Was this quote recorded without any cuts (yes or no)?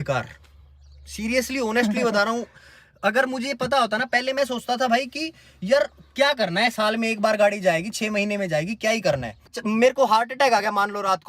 no